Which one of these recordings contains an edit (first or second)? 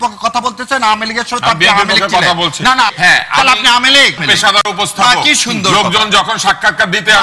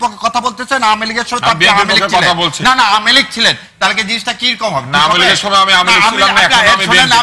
first